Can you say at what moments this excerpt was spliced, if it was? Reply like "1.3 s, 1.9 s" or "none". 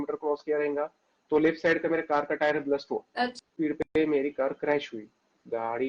3.5 s